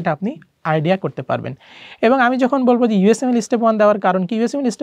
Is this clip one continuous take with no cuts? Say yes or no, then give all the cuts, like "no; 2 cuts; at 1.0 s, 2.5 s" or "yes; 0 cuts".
yes; 0 cuts